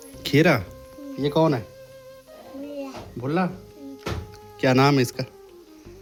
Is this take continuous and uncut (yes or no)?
yes